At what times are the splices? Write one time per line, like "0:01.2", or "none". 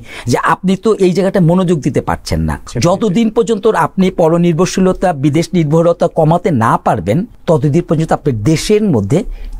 0:02.6
0:07.3